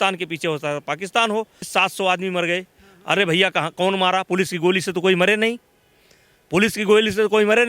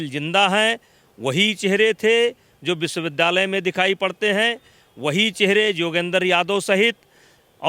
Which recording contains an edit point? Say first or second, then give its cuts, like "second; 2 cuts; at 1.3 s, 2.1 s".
first; 1 cut; at 1.6 s